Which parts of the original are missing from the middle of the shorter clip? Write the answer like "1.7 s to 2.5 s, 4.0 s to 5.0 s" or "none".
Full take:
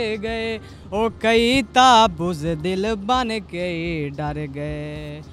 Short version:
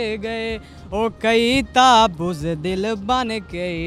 none